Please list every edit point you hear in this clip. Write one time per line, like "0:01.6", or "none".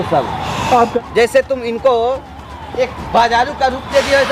0:00.9